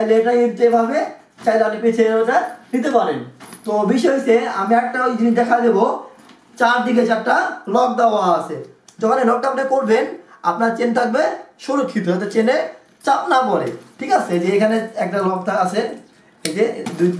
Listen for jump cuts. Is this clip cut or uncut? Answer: uncut